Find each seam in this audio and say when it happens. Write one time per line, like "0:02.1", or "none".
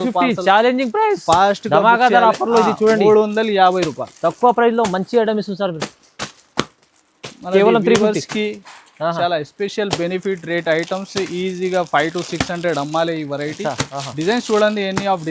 none